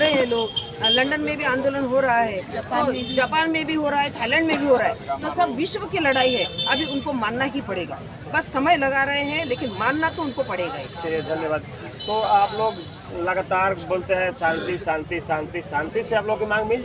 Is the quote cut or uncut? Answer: uncut